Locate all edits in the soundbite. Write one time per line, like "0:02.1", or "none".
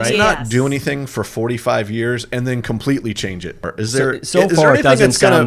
0:03.7